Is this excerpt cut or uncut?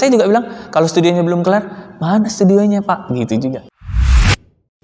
cut